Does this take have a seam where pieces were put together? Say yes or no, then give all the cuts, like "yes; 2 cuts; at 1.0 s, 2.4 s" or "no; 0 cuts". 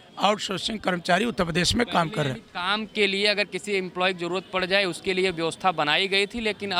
no; 0 cuts